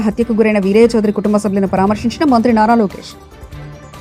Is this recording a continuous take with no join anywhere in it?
yes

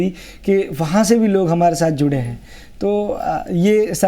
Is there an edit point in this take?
no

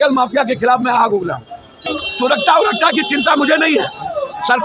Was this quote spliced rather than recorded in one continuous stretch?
yes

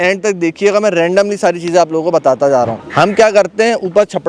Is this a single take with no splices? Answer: no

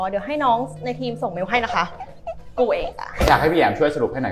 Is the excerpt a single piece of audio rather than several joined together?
no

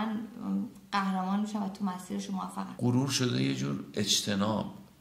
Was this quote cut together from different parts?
yes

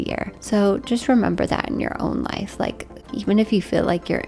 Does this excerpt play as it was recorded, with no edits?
no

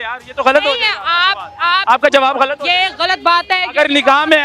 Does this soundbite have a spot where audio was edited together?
no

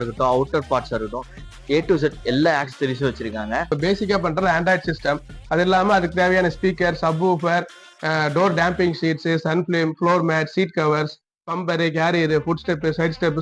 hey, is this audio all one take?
no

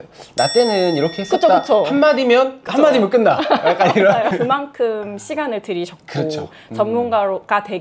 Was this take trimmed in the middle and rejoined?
no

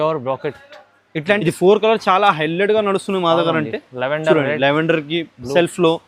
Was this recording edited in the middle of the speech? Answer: yes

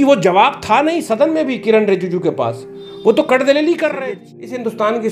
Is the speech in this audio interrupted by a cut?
yes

